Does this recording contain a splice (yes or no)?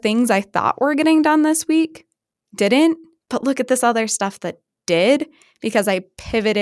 no